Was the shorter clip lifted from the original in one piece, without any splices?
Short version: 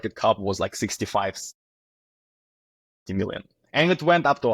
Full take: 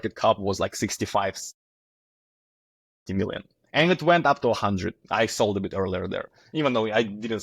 yes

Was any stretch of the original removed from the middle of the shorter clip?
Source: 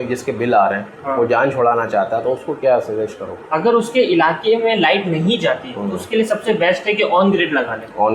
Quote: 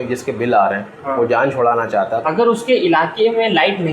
yes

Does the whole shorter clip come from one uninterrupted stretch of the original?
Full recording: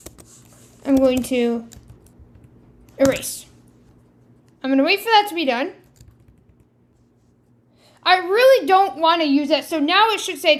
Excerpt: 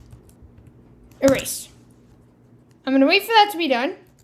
yes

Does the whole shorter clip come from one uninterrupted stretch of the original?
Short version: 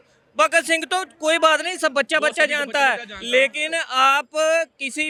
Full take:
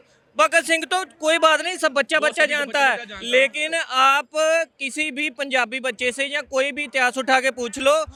yes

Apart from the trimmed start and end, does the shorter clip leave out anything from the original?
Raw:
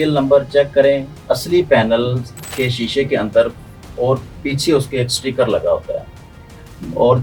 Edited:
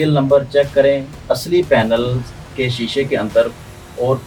no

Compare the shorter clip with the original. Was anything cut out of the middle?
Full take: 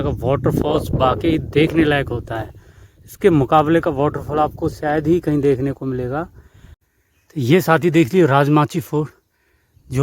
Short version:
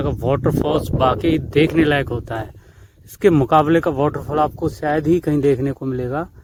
no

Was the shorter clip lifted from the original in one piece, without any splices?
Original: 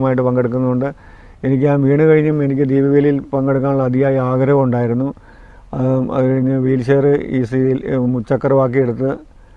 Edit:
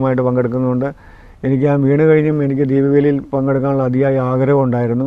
yes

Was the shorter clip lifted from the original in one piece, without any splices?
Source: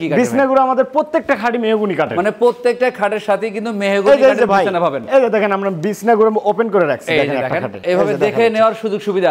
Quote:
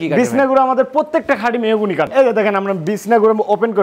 no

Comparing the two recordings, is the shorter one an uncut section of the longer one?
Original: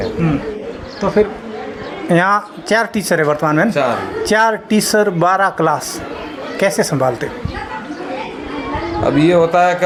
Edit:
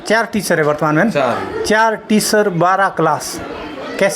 yes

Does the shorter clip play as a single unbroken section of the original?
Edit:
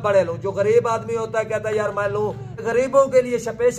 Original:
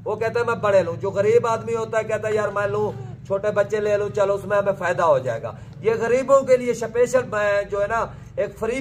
no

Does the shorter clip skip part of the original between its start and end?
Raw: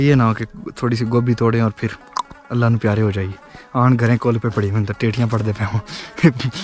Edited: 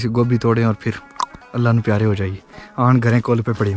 no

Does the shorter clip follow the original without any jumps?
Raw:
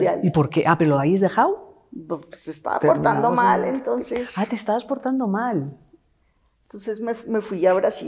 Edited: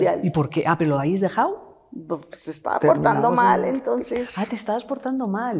yes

